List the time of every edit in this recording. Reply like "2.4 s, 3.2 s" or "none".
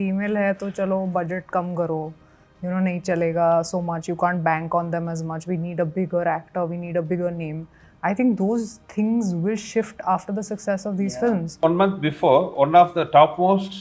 11.6 s

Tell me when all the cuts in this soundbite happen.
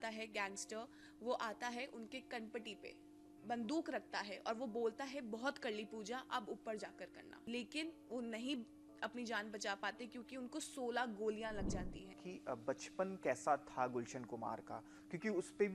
7.5 s, 12.2 s

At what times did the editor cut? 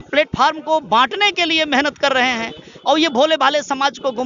none

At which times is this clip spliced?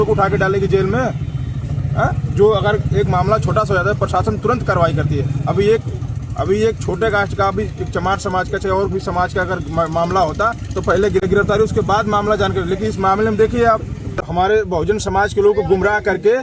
11.3 s, 14.2 s

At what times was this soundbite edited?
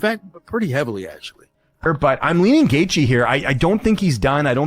1.8 s

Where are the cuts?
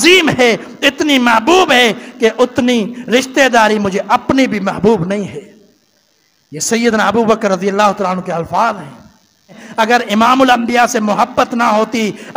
9.6 s

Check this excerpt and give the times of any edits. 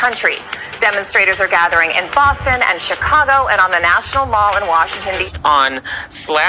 5.3 s

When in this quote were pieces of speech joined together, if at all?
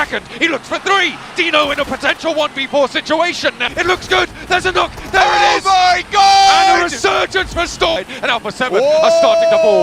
3.6 s, 8.0 s

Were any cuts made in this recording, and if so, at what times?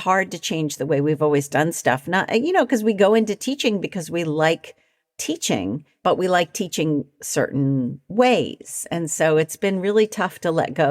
5.9 s

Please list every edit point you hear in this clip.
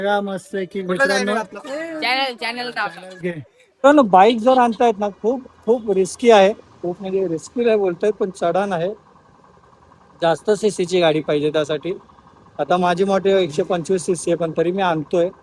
3.8 s

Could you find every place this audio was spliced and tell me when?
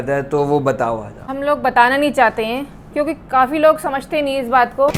none

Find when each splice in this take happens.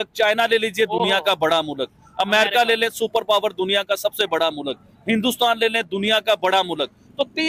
none

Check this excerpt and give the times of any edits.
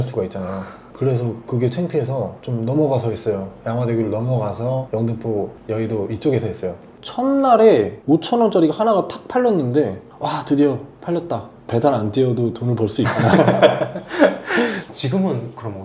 6.9 s, 14.9 s

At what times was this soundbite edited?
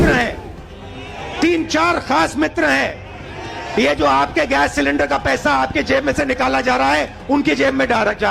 none

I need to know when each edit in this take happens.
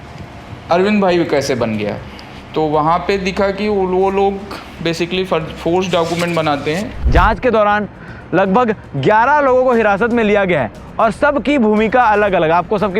6.9 s

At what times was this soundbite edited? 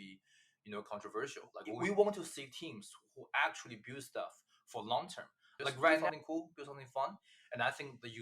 1.6 s, 6.0 s

